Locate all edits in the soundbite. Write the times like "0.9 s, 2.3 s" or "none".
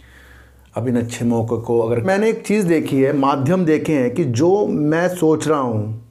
2.0 s